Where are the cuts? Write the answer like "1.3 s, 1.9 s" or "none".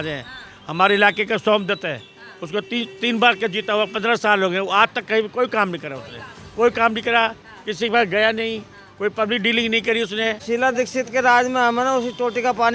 10.4 s